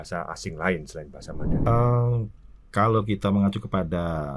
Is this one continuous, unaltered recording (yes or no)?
no